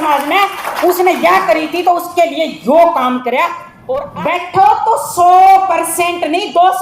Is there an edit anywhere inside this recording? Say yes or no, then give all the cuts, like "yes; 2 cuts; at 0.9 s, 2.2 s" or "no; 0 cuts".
yes; 1 cut; at 3.7 s